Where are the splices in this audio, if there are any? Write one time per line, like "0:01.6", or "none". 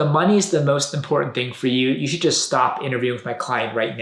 none